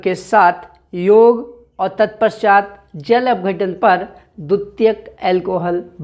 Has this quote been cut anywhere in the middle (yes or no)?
no